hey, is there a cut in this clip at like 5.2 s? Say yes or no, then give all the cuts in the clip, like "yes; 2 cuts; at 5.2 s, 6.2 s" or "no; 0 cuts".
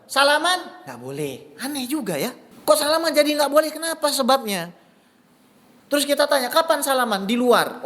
no; 1 cut; at 2.5 s